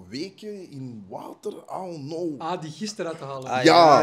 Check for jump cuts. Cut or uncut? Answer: cut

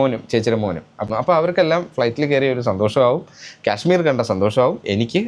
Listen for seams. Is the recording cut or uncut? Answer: cut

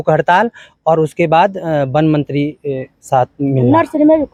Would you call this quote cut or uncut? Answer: uncut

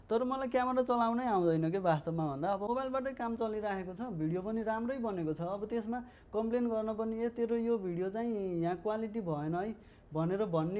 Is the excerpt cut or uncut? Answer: cut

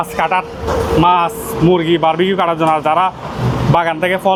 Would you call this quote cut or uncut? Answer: uncut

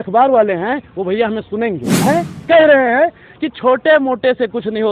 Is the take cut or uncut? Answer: cut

